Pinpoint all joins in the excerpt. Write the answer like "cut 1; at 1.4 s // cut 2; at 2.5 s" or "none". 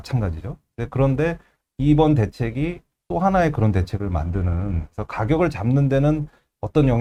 none